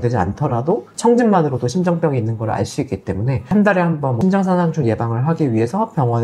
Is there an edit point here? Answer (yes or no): yes